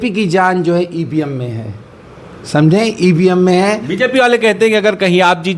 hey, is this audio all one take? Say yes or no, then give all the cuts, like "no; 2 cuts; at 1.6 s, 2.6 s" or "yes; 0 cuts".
yes; 0 cuts